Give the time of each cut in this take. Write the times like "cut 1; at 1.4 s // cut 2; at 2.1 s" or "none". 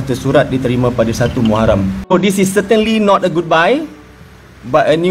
cut 1; at 2.1 s